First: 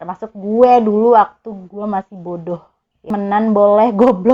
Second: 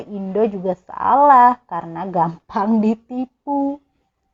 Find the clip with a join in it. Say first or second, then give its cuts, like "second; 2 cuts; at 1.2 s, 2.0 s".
first; 1 cut; at 3.0 s